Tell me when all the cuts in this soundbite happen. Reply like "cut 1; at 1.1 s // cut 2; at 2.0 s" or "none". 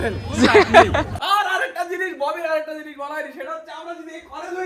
cut 1; at 1.2 s

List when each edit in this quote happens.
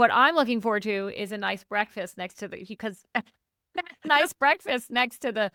none

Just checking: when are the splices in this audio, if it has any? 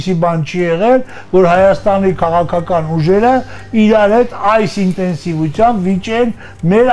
none

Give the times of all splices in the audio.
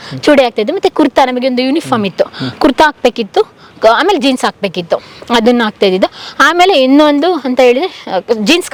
none

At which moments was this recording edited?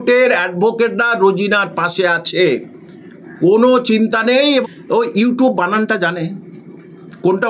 cut 1; at 4.4 s

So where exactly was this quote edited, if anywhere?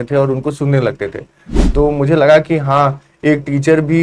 none

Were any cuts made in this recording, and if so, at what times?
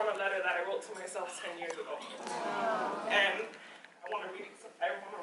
none

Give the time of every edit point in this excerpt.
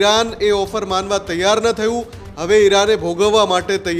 none

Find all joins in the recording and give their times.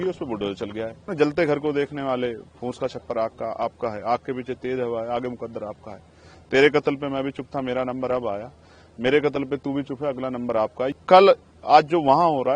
cut 1; at 1.1 s // cut 2; at 10.9 s

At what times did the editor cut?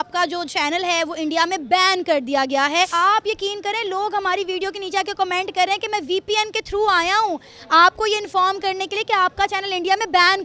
cut 1; at 2.9 s

